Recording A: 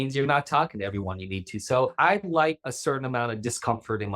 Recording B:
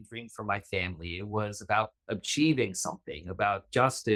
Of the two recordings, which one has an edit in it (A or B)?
A